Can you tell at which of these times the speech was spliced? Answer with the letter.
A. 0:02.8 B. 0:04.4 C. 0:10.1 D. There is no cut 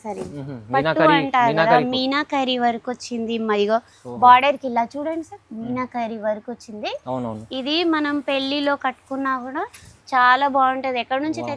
D